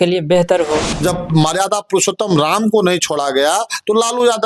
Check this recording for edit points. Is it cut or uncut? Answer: cut